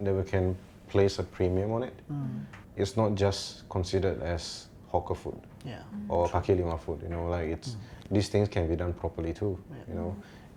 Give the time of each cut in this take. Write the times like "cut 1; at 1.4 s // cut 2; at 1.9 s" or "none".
none